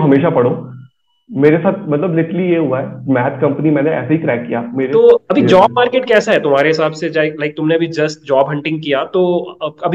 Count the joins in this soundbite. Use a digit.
1